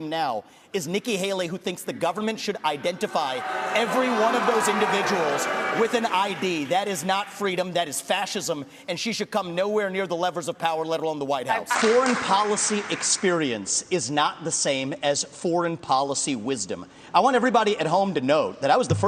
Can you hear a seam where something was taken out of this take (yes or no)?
no